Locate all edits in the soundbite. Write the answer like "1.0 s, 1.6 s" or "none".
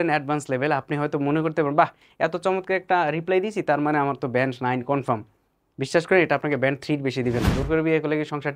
7.5 s